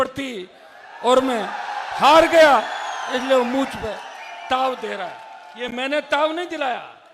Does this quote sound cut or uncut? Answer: uncut